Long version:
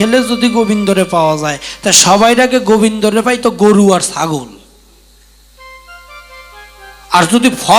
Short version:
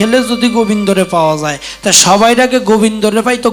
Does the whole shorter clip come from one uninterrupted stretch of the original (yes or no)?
yes